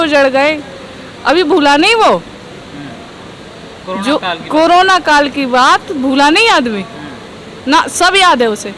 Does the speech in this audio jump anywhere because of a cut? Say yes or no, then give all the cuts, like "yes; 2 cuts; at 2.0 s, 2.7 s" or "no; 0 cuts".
no; 0 cuts